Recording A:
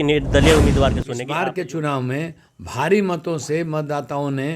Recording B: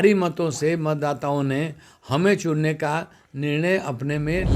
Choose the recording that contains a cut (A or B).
A